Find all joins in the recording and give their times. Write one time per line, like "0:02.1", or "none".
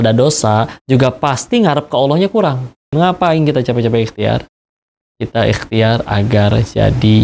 0:02.9